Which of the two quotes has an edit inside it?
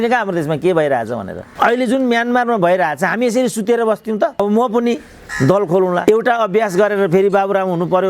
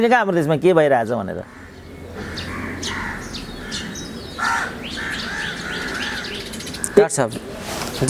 first; 2 cuts; at 1.4 s, 4.4 s

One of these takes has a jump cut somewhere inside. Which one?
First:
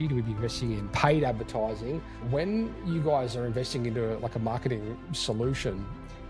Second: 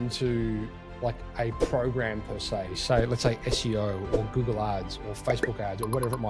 first; 2 cuts; at 0.9 s, 2.1 s

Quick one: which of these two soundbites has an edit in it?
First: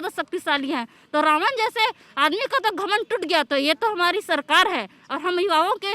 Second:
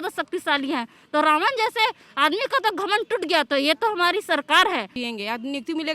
second; 1 cut; at 5.0 s

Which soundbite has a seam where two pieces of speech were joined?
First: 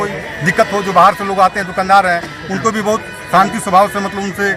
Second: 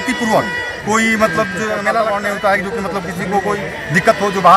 second; 1 cut; at 2.0 s

